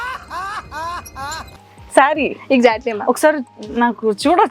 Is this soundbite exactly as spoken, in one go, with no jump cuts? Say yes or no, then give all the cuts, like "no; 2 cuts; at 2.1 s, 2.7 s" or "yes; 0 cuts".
yes; 0 cuts